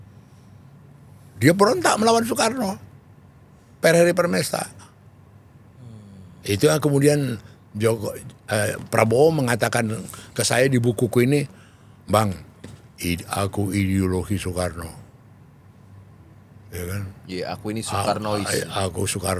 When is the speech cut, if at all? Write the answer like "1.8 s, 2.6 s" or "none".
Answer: none